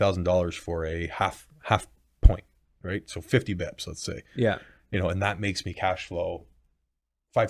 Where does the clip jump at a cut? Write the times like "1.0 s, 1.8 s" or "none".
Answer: none

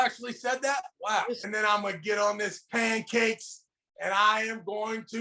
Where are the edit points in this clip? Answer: 1.4 s

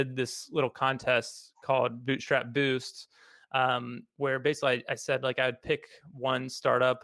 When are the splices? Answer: none

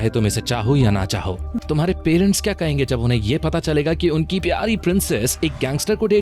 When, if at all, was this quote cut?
1.5 s

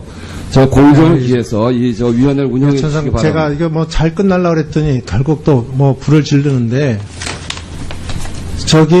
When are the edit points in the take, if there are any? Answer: 5.9 s

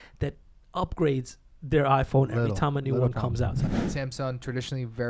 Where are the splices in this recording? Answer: 3.6 s

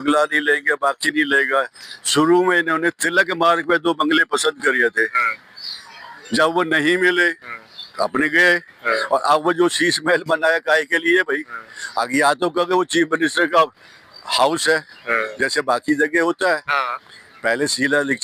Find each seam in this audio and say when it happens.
none

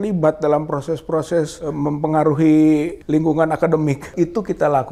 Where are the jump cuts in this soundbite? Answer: 1.6 s, 3.0 s, 4.1 s

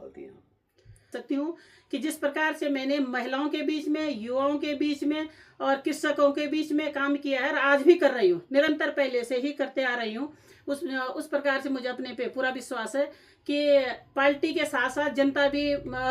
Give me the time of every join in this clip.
1.1 s

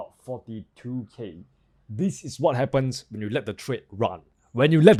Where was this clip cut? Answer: none

